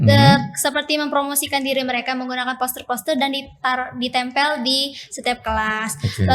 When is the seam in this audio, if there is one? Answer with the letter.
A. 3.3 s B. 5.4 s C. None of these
C